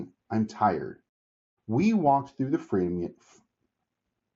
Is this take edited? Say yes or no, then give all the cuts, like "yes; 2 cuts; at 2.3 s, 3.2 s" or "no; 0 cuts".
no; 0 cuts